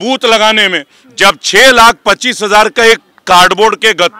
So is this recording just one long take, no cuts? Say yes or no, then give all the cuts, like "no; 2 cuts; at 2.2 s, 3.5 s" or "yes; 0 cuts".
yes; 0 cuts